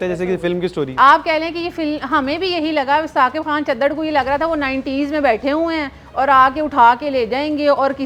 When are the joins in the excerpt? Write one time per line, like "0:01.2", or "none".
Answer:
none